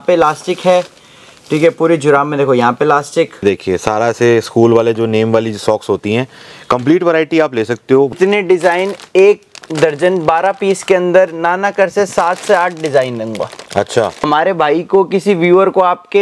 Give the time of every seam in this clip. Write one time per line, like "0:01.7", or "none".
0:03.4
0:08.1
0:14.2